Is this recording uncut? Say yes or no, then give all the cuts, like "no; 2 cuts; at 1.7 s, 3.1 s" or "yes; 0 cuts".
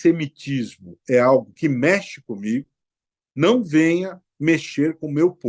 yes; 0 cuts